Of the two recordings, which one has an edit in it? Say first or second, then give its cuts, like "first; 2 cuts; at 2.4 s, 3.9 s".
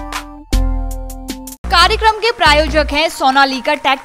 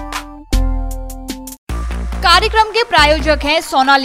first; 1 cut; at 1.6 s